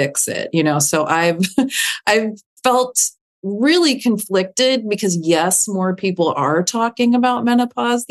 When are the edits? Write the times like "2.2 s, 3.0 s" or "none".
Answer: none